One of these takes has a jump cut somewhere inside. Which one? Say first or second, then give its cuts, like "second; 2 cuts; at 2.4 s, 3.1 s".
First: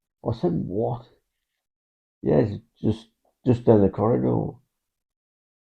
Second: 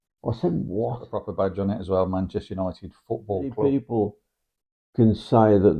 second; 2 cuts; at 1.1 s, 3.6 s